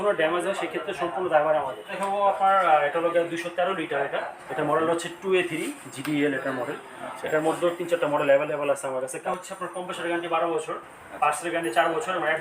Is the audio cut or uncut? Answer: cut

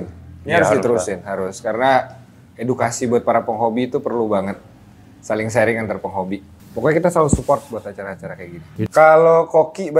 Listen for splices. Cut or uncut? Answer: cut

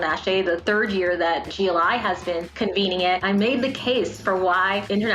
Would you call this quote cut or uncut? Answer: cut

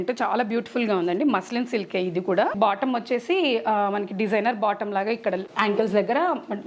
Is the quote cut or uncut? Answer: cut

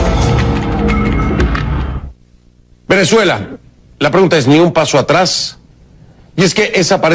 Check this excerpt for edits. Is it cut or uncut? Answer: uncut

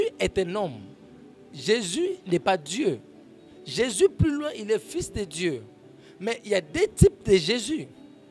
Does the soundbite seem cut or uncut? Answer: uncut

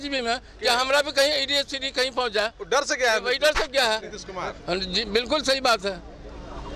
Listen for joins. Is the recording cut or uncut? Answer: uncut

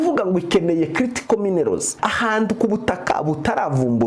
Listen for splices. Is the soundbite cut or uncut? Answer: cut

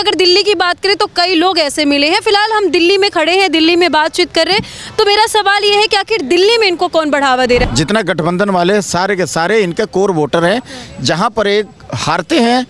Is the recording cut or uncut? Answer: cut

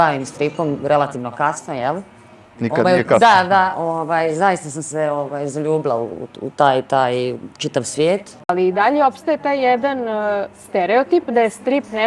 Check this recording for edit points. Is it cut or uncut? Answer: cut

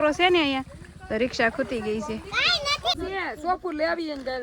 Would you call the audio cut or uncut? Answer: cut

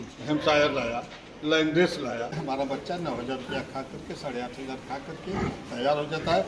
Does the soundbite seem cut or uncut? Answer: cut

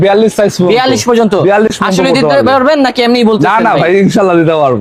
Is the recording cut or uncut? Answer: uncut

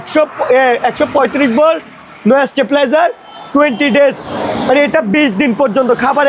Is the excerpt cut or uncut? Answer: uncut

